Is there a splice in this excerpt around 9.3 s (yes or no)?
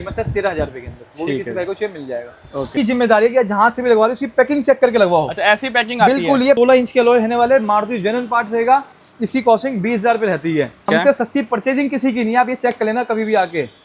no